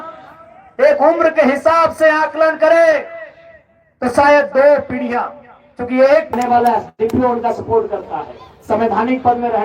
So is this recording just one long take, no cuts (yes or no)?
no